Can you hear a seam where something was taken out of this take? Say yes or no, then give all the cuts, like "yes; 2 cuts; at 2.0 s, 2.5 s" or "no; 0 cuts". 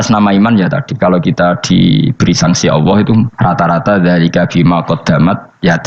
yes; 1 cut; at 3.3 s